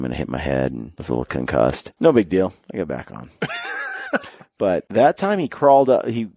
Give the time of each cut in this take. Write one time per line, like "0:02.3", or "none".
0:00.9
0:01.9
0:02.6
0:04.4